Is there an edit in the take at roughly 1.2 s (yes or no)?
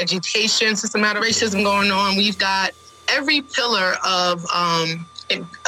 yes